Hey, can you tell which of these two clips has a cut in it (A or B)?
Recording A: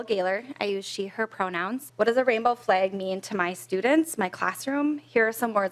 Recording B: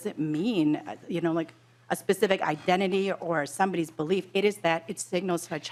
A